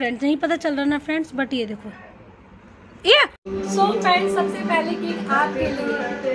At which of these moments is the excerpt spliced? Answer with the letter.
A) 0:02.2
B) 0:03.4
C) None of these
B